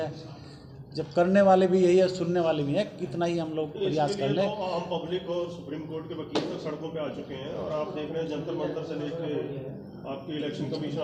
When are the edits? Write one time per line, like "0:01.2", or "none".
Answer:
none